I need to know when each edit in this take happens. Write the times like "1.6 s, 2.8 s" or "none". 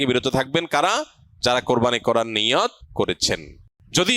3.2 s